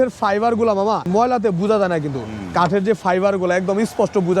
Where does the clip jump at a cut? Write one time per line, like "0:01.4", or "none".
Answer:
0:01.1